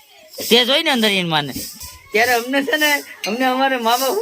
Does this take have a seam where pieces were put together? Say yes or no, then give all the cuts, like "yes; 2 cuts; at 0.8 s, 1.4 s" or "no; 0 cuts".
yes; 1 cut; at 1.8 s